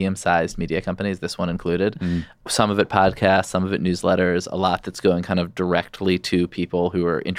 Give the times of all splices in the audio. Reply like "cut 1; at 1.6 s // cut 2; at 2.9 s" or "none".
cut 1; at 2.3 s